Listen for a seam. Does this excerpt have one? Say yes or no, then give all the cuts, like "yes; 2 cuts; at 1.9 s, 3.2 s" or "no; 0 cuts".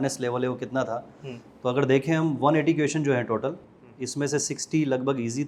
no; 0 cuts